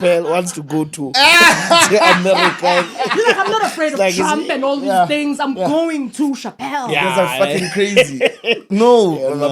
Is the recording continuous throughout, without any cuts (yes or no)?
yes